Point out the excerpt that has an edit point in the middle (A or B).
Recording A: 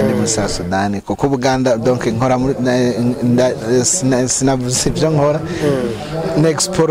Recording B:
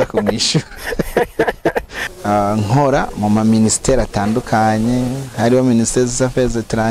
B